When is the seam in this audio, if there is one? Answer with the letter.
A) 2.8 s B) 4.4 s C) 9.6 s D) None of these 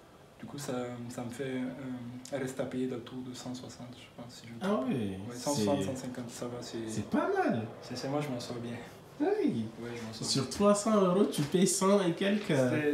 D